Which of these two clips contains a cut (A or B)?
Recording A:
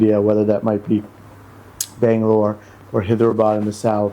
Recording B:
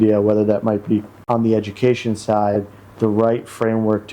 B